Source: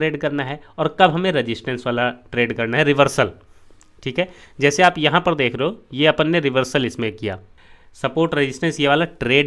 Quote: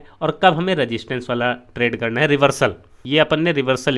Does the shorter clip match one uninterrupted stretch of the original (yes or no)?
no